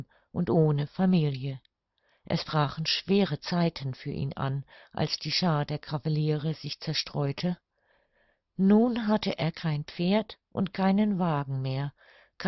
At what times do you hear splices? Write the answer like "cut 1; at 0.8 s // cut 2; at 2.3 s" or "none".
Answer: cut 1; at 6.1 s